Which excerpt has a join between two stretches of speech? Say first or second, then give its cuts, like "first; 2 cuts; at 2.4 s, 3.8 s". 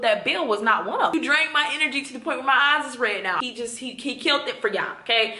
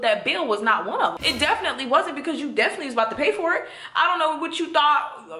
first; 2 cuts; at 1.1 s, 3.4 s